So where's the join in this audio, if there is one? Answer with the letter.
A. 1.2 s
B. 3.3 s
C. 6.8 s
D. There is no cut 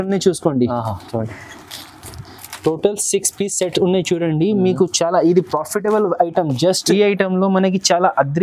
C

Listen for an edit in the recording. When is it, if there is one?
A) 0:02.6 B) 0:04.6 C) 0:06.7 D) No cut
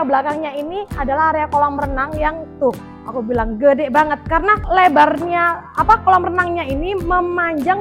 B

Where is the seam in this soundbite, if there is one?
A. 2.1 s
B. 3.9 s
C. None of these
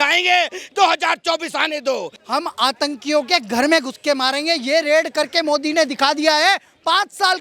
A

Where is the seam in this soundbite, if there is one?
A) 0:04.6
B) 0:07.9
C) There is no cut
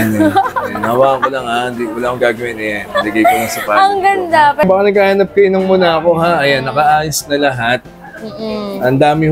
A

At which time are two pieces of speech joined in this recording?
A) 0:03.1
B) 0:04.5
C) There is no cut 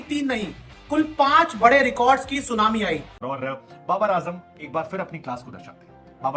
A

